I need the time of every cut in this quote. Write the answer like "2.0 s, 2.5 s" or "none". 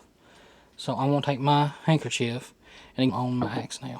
3.1 s